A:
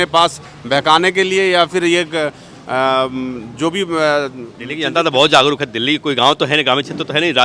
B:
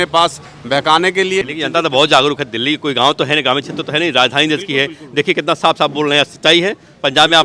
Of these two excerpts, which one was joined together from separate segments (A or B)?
B